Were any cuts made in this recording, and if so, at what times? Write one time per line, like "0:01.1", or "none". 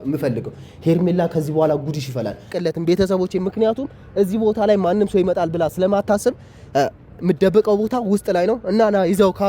0:02.5